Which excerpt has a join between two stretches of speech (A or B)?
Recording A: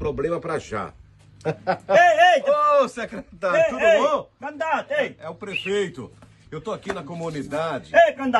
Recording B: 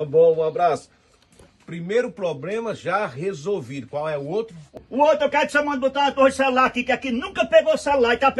B